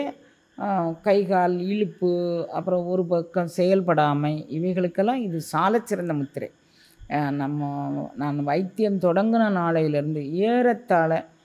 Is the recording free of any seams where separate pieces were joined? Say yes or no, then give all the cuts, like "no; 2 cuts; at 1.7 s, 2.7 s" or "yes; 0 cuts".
yes; 0 cuts